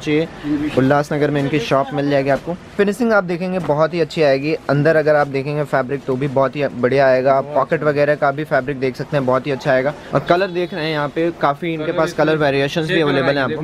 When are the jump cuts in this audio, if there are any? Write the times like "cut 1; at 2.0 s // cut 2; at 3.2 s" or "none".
cut 1; at 2.7 s // cut 2; at 10.0 s